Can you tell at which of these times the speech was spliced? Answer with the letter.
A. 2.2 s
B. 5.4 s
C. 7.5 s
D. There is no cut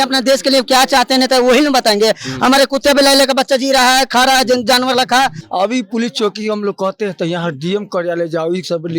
B